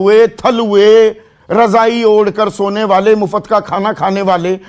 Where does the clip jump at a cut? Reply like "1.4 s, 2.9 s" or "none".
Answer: none